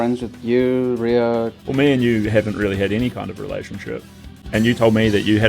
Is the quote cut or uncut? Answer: cut